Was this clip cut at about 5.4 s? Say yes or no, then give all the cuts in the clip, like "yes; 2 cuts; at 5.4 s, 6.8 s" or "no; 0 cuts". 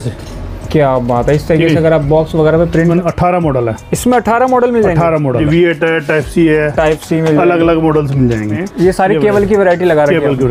yes; 3 cuts; at 2.9 s, 5.4 s, 8.6 s